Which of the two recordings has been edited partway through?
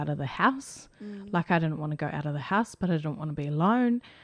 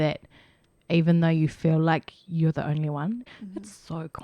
second; 1 cut; at 3.2 s

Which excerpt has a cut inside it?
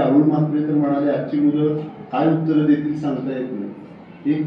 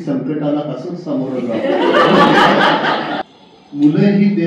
second; 1 cut; at 3.2 s

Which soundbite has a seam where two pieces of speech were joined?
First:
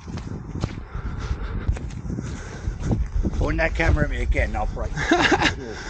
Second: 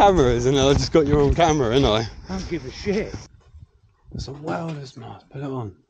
second; 1 cut; at 3.3 s

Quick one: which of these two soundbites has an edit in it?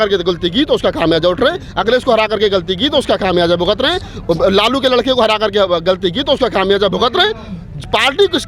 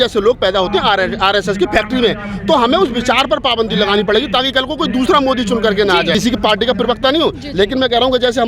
second; 1 cut; at 6.1 s

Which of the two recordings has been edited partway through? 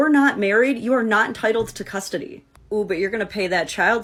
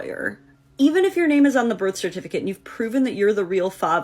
second; 1 cut; at 1.5 s

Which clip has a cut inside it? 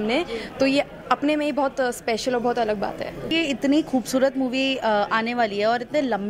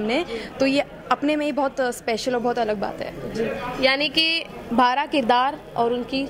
first; 1 cut; at 3.3 s

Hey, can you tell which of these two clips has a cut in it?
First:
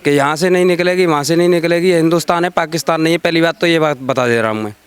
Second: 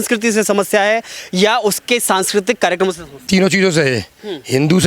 second; 1 cut; at 3.3 s

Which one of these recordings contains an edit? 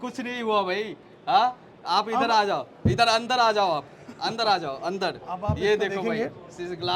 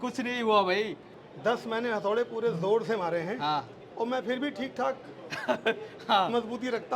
second; 2 cuts; at 1.1 s, 3.7 s

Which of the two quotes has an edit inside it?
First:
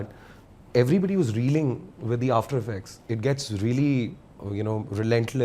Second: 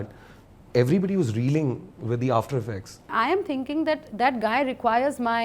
second; 1 cut; at 3.0 s

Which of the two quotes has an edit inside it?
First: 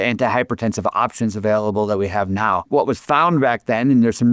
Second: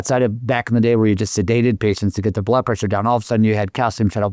first; 1 cut; at 2.7 s

